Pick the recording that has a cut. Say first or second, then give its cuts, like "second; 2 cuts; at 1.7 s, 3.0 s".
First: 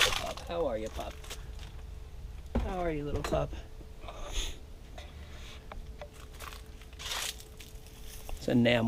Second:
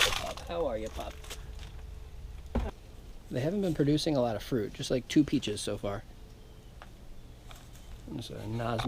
second; 1 cut; at 2.7 s